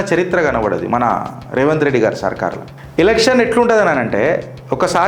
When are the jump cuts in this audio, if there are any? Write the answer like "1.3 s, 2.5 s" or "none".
2.7 s